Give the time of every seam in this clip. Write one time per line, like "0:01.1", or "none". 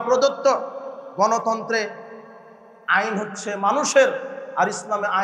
none